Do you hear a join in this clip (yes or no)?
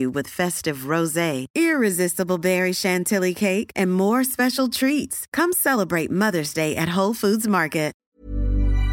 yes